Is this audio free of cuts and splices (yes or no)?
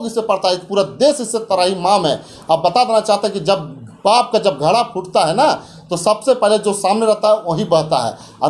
yes